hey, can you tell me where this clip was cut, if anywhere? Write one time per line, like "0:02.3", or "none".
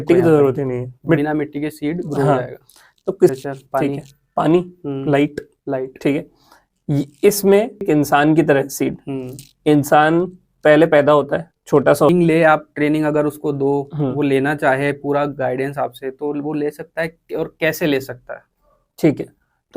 0:03.3
0:07.8
0:12.1